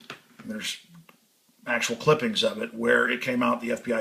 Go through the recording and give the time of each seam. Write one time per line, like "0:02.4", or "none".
none